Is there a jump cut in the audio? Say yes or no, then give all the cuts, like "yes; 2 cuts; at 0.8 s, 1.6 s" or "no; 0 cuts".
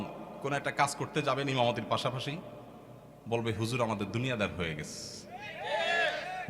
no; 0 cuts